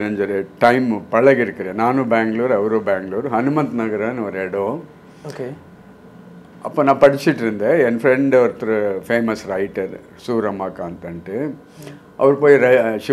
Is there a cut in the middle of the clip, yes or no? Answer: no